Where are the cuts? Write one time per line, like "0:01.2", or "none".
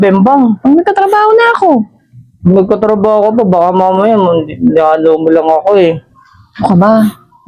none